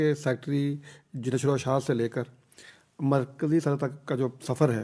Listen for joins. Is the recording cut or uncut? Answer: uncut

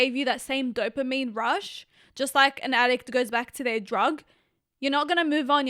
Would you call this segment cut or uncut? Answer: uncut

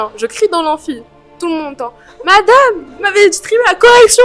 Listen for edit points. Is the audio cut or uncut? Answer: uncut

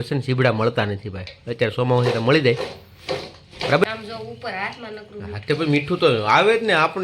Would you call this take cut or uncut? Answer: cut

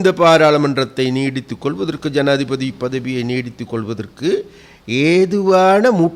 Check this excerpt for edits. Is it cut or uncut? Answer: uncut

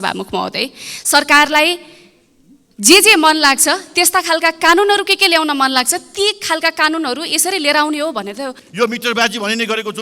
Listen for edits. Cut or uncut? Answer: cut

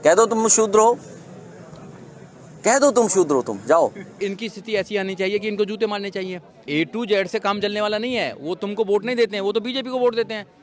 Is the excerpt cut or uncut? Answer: cut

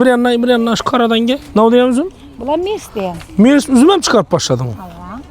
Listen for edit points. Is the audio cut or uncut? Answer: cut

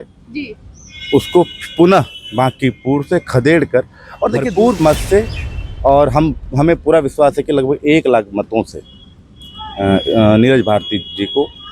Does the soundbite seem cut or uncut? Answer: cut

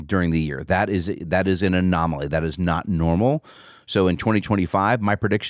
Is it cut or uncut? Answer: cut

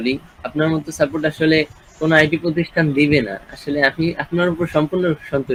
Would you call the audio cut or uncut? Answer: uncut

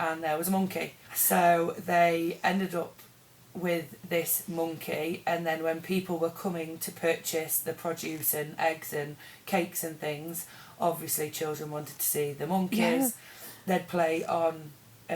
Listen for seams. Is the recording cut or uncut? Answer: cut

